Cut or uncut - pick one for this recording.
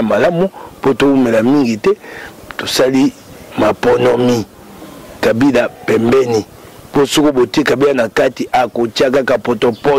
uncut